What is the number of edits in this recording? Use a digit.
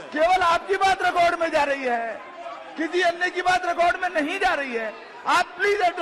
0